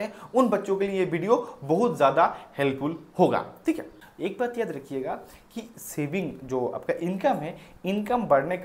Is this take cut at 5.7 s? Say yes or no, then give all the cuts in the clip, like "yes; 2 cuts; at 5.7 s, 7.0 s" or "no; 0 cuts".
no; 1 cut; at 3.9 s